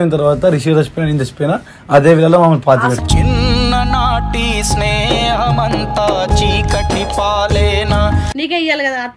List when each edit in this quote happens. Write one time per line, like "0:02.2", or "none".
0:08.2